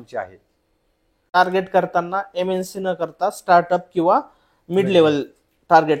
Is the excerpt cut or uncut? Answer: cut